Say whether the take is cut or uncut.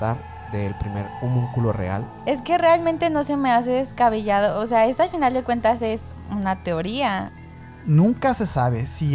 cut